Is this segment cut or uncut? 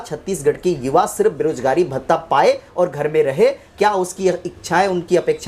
uncut